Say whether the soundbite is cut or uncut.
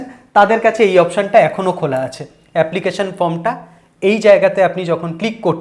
uncut